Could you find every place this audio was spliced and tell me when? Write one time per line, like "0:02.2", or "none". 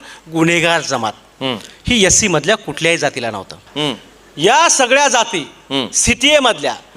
0:03.7